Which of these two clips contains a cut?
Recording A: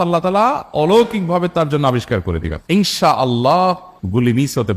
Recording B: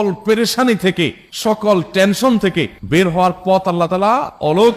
A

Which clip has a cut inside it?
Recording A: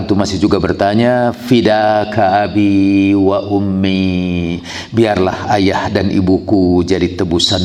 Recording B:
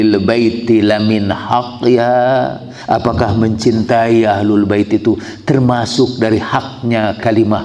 B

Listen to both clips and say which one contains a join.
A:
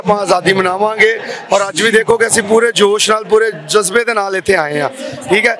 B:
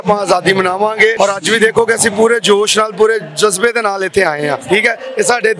B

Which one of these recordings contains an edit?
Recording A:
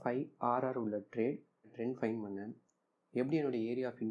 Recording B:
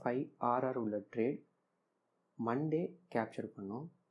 A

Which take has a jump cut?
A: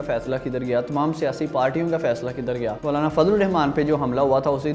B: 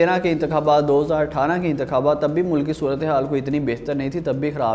A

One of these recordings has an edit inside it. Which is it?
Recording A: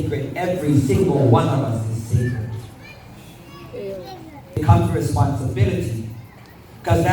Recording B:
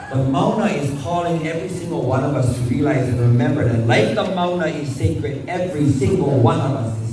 A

